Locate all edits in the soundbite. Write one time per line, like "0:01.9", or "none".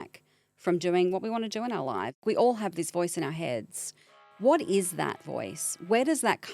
0:02.2
0:04.2